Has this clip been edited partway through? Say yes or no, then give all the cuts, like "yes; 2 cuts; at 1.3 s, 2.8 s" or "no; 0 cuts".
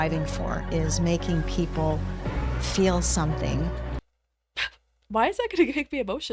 no; 0 cuts